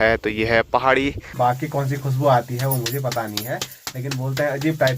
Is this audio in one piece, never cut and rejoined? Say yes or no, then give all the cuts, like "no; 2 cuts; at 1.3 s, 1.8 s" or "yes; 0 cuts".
no; 1 cut; at 1.3 s